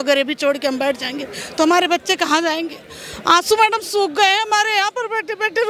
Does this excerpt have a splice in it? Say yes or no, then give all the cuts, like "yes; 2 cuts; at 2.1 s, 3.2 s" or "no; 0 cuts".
no; 0 cuts